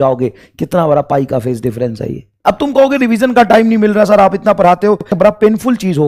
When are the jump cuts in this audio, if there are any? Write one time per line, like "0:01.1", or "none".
0:02.4
0:05.2